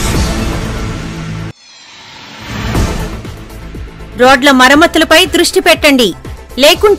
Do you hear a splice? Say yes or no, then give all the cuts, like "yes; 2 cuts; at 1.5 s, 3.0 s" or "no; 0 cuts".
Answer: yes; 1 cut; at 1.2 s